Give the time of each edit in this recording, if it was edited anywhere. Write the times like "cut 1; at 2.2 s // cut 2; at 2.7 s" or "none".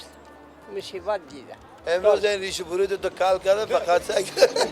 cut 1; at 1.7 s